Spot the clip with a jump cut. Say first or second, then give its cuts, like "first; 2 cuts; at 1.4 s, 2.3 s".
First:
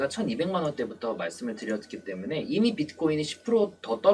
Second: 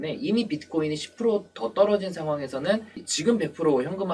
second; 1 cut; at 3.0 s